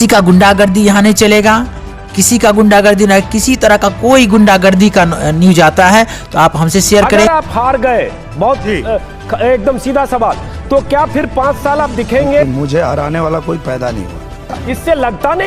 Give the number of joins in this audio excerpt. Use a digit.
3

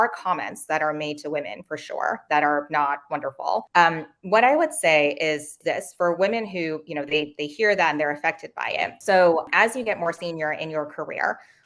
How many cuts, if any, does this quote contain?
0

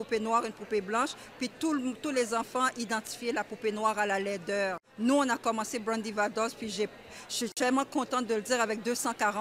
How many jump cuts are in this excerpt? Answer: 1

